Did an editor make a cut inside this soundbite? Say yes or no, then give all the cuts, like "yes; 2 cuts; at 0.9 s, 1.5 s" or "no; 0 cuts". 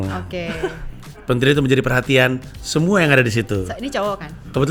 no; 0 cuts